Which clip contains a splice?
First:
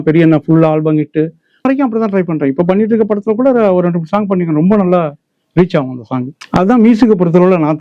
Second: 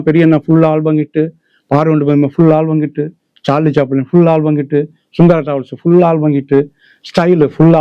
first; 2 cuts; at 1.7 s, 6.4 s

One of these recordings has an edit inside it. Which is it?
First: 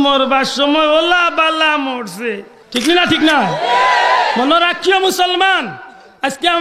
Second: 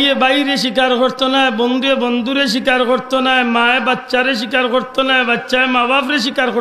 first; 1 cut; at 2.5 s

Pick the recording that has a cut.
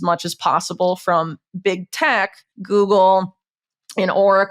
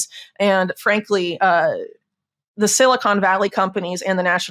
first; 1 cut; at 2.5 s

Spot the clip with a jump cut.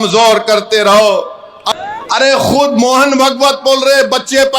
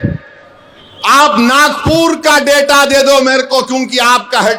first; 1 cut; at 1.6 s

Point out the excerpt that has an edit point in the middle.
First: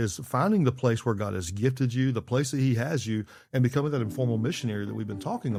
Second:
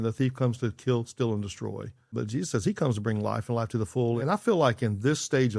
second; 2 cuts; at 2.1 s, 4.2 s

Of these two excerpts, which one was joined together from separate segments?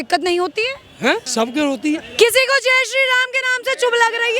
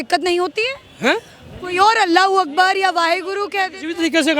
first; 1 cut; at 1.3 s

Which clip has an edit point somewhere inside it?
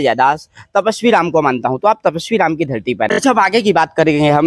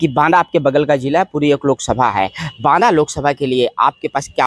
first; 1 cut; at 3.1 s

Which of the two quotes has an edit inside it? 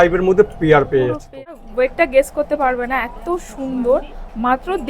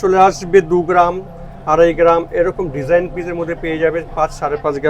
first; 1 cut; at 1.3 s

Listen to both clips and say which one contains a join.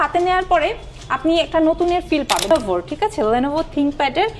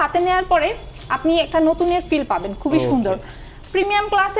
first; 1 cut; at 2.5 s

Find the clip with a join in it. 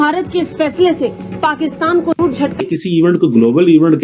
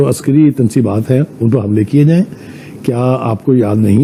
first; 1 cut; at 2.6 s

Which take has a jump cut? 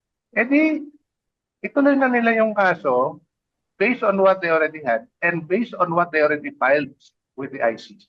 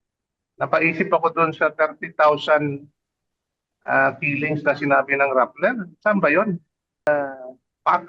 second; 1 cut; at 7.1 s

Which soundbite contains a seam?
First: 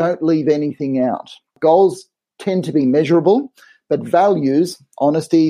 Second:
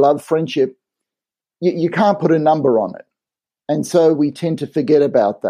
first; 1 cut; at 1.6 s

